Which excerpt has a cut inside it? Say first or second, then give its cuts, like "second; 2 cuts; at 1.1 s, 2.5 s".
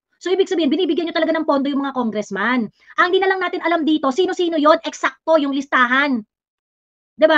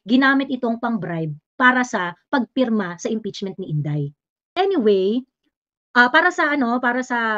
second; 1 cut; at 4.5 s